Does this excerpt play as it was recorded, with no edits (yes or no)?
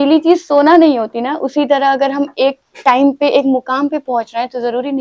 yes